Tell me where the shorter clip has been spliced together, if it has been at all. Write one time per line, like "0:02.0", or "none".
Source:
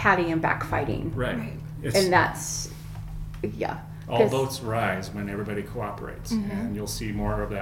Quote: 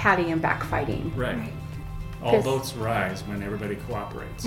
0:01.9